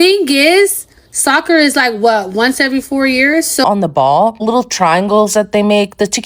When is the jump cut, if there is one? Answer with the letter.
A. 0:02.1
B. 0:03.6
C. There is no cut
B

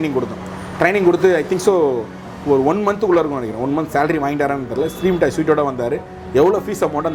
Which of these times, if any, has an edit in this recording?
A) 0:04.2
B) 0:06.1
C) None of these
C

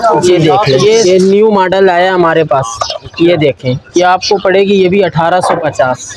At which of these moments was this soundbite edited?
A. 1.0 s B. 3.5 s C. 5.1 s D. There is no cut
A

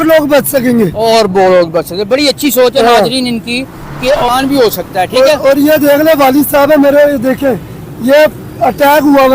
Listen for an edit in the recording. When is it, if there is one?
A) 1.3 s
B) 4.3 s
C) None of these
B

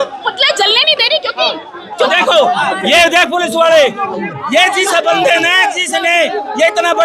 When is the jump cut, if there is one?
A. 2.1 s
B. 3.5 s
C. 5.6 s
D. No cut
A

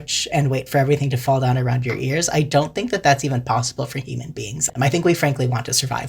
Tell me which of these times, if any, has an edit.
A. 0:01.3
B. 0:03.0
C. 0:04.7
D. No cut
C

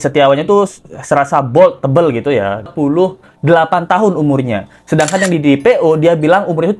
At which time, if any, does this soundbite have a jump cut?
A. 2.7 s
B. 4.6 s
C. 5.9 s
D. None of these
A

